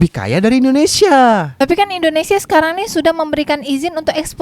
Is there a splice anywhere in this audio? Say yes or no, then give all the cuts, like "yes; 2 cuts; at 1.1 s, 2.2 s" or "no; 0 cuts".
yes; 1 cut; at 1.5 s